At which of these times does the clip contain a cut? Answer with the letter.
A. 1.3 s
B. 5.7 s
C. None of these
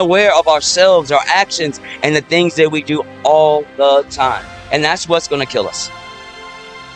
B